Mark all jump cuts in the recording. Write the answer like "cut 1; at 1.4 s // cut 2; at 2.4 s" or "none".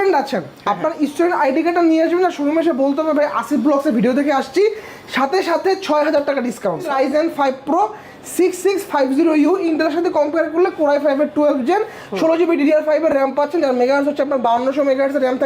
cut 1; at 6.9 s